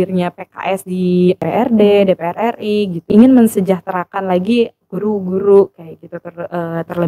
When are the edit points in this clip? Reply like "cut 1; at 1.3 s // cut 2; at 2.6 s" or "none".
cut 1; at 1.5 s // cut 2; at 3.1 s

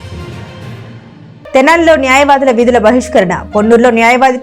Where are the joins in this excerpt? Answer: cut 1; at 1.5 s

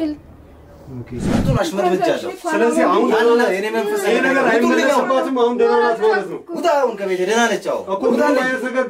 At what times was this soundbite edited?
cut 1; at 1.4 s

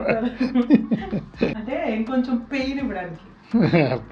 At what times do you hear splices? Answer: cut 1; at 1.6 s

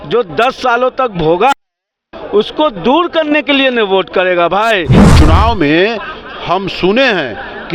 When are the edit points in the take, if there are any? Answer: cut 1; at 5.0 s

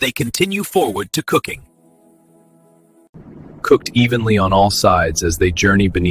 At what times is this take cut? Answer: cut 1; at 3.1 s

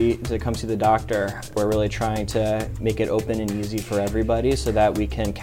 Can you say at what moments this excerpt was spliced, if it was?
cut 1; at 1.6 s // cut 2; at 2.7 s

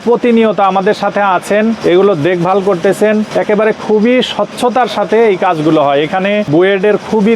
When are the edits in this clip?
cut 1; at 1.8 s // cut 2; at 3.3 s // cut 3; at 6.5 s

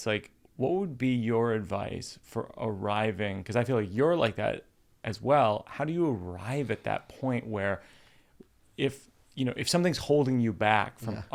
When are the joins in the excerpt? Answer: none

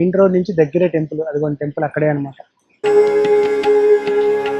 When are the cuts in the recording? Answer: cut 1; at 2.8 s

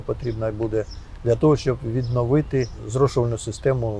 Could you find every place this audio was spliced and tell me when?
cut 1; at 2.8 s

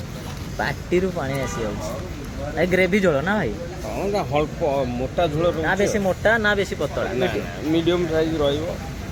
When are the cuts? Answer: none

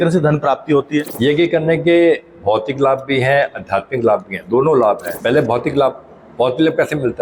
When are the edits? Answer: cut 1; at 1.1 s // cut 2; at 5.1 s

